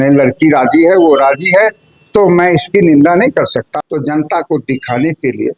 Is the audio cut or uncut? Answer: cut